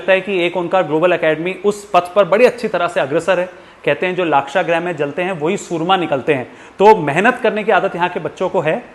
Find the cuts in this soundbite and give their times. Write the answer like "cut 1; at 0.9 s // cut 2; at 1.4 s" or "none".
none